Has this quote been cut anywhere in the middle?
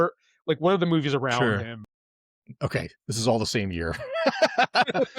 yes; 1 cut; at 2.4 s

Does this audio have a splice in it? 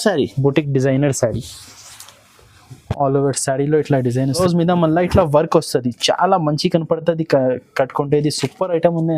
yes; 1 cut; at 4.4 s

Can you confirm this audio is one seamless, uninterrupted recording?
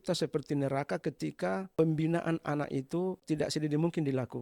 no; 2 cuts; at 1.7 s, 3.2 s

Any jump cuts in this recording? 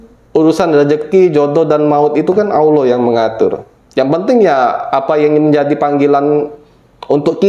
no; 0 cuts

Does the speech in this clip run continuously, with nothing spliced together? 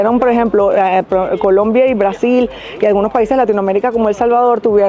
yes; 0 cuts

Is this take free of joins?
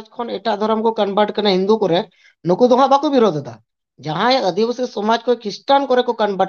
yes; 0 cuts

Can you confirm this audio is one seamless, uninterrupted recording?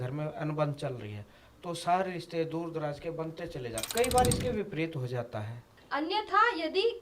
no; 2 cuts; at 3.9 s, 5.8 s

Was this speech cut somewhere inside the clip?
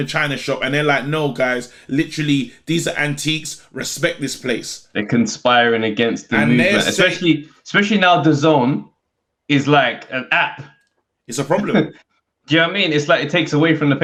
no; 0 cuts

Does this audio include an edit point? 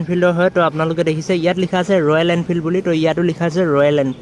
no; 0 cuts

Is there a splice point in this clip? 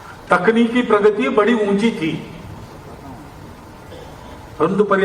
yes; 1 cut; at 2.6 s

